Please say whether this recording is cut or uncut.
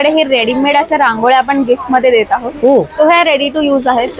uncut